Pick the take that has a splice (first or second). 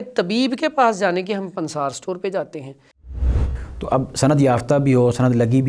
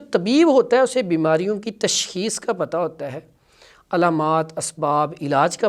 first